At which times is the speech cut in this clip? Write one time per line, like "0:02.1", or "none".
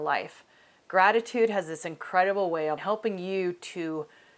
0:02.8